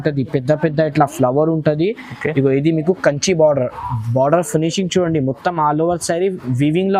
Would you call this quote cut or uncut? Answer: uncut